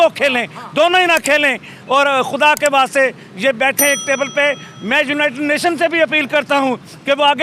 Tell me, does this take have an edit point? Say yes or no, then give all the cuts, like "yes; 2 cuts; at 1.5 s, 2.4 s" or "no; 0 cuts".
no; 0 cuts